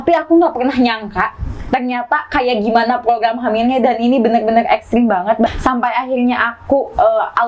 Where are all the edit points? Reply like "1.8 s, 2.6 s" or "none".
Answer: 5.5 s